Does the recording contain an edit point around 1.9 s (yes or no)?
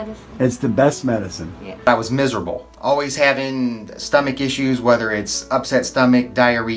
yes